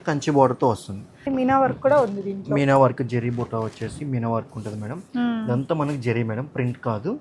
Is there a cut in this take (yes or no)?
yes